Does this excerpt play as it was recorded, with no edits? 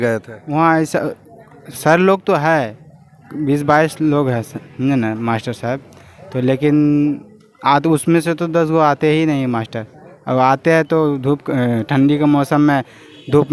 yes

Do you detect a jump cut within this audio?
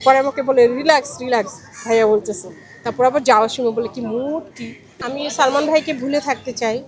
yes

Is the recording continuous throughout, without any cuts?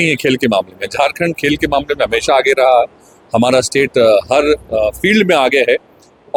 yes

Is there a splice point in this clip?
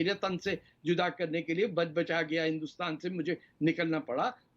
no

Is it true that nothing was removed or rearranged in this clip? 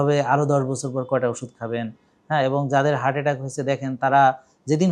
yes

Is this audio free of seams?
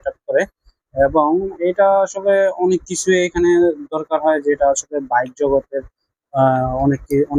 yes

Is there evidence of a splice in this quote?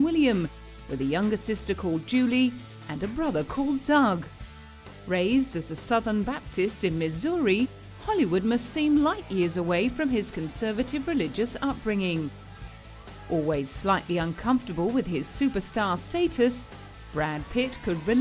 no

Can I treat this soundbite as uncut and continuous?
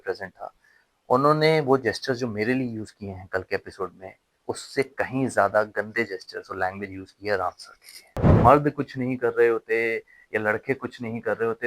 no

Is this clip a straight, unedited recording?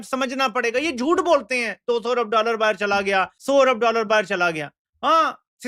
yes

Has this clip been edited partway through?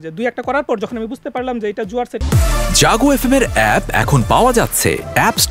yes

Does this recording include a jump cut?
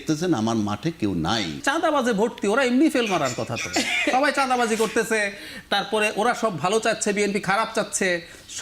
yes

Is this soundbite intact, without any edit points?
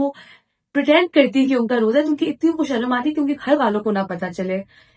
yes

